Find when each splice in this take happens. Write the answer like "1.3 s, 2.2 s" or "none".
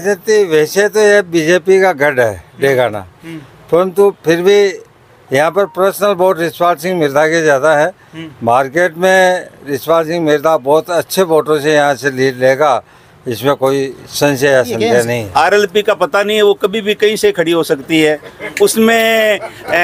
15.2 s

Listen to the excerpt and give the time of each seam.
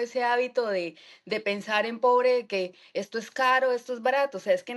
none

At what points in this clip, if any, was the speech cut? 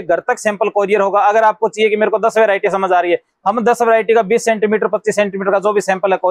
none

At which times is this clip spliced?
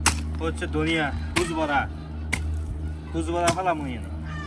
none

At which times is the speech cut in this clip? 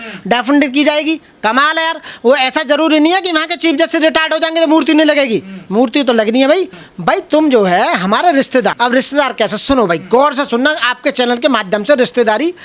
6.7 s

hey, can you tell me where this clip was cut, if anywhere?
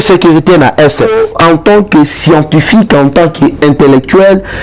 1.1 s

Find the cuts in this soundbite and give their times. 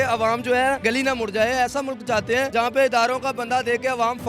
0.8 s, 2.5 s

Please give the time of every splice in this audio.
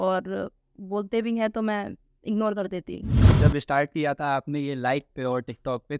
3.3 s

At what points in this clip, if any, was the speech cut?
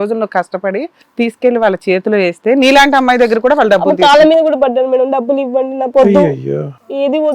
1.0 s

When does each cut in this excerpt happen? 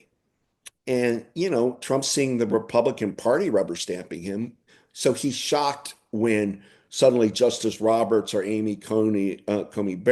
none

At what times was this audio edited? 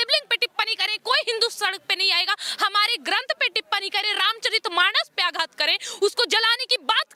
none

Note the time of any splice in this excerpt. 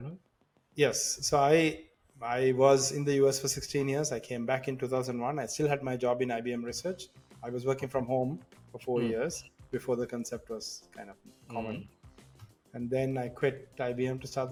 none

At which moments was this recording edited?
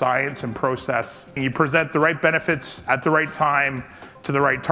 1.3 s

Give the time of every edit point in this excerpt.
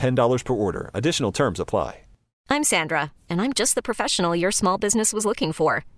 2.3 s

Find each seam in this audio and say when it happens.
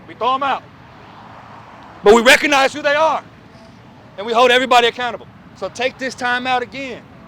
5.4 s

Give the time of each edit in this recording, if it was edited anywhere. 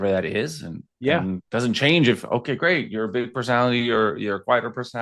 1.4 s

